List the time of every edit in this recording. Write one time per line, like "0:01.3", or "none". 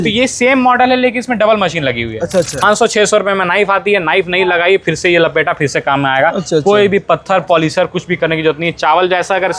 0:02.6